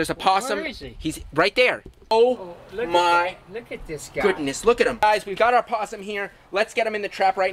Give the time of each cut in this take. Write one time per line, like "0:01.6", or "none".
0:02.1
0:05.0